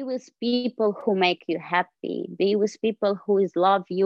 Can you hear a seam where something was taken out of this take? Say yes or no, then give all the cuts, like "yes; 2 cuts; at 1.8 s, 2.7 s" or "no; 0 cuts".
no; 0 cuts